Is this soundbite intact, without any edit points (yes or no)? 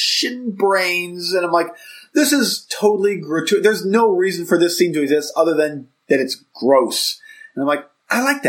yes